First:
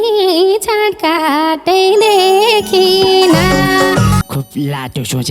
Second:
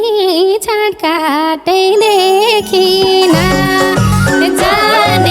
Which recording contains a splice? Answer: first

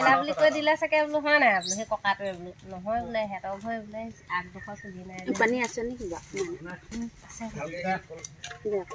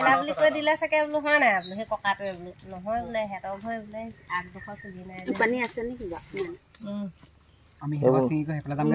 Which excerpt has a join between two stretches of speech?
second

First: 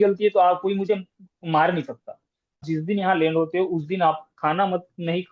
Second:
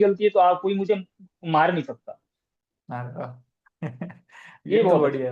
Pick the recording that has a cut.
first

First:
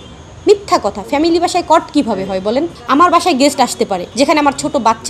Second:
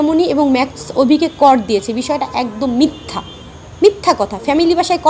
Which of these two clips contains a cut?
first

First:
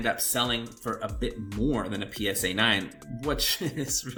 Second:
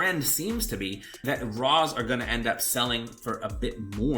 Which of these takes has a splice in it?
second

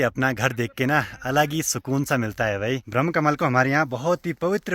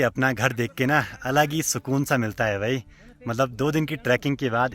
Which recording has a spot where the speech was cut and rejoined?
first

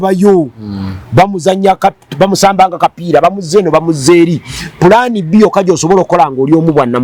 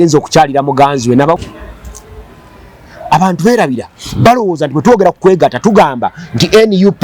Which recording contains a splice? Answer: second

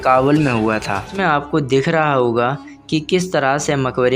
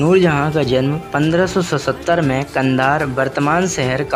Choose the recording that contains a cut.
first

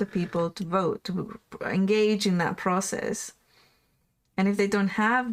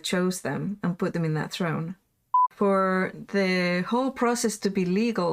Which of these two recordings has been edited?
second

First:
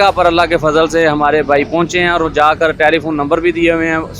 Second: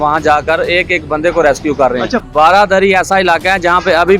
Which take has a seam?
second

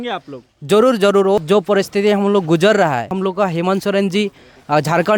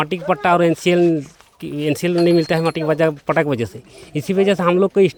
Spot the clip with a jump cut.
first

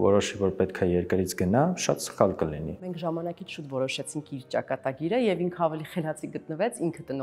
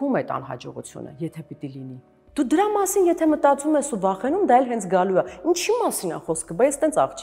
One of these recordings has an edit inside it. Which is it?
first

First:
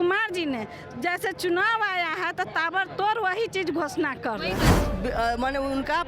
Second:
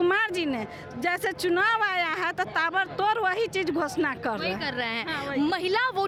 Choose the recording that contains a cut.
first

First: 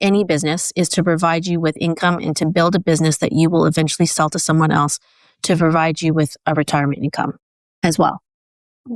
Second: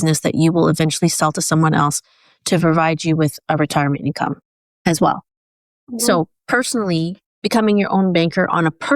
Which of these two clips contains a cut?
second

